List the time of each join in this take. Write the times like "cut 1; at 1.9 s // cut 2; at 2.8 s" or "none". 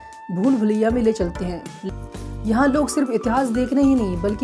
cut 1; at 1.8 s